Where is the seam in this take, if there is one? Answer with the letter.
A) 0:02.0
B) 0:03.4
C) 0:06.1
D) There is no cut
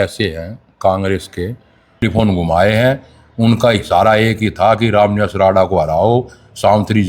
A